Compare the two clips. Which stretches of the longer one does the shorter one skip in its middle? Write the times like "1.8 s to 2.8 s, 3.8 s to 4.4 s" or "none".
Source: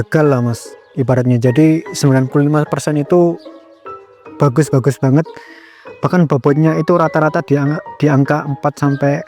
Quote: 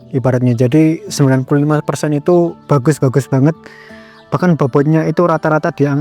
3.4 s to 4.3 s